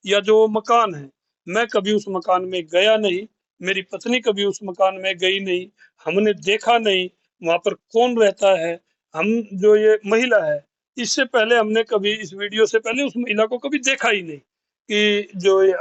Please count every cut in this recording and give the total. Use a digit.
0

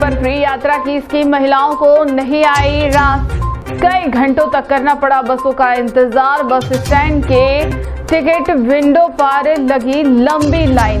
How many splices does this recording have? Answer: 0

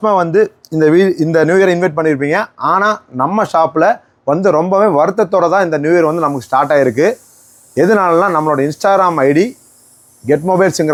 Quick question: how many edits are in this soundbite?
0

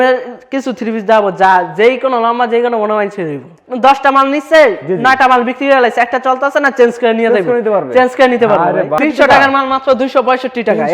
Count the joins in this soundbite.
2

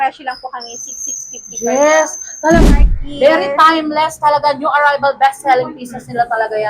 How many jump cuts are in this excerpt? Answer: 1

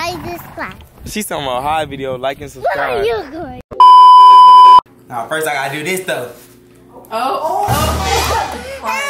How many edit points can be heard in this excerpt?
1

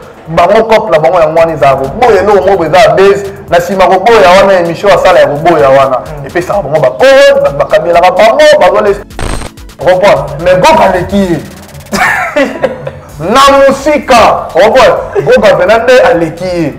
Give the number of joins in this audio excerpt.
1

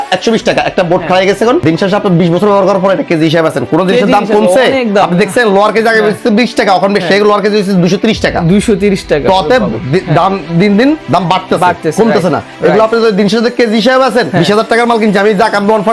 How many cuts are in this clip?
2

